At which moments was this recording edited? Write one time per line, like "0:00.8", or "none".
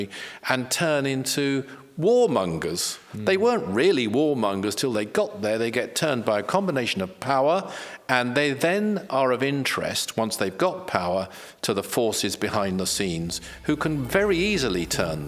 none